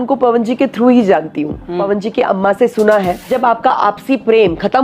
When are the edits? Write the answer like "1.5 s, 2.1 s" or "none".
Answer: 1.8 s, 3.2 s